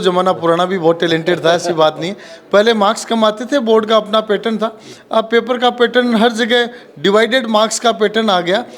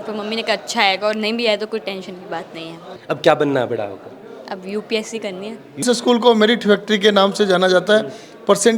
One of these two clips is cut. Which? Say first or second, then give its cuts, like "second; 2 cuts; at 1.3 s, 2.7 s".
second; 2 cuts; at 2.9 s, 5.8 s